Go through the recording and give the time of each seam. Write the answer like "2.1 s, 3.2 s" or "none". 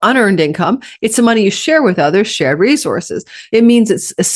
3.4 s